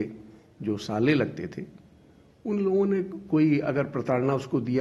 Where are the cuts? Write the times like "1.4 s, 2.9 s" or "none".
none

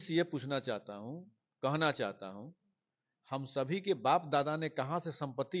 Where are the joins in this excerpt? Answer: none

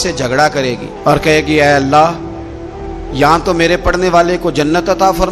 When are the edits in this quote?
none

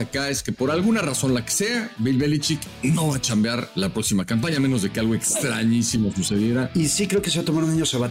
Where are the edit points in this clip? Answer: 2.7 s, 3.7 s, 6.7 s

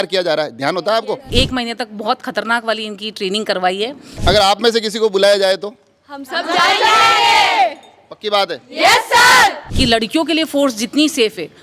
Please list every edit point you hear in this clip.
1.3 s, 4.1 s, 9.7 s

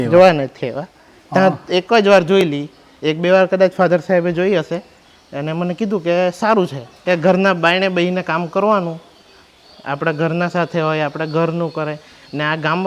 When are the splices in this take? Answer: 6.9 s

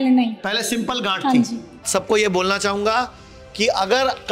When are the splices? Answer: 1.8 s

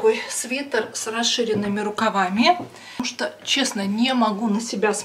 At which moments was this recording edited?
3.1 s

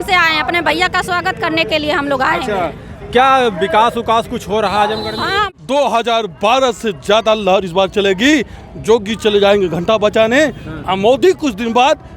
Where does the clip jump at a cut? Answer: 5.5 s

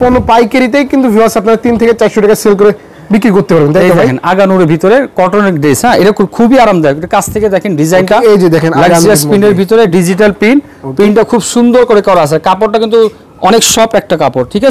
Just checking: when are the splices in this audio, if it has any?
none

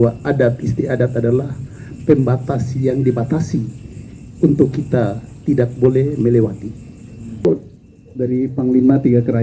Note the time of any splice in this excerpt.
7.4 s

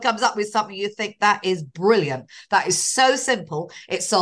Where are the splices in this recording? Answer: none

